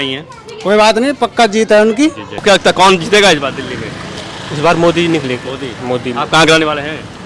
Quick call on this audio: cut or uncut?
cut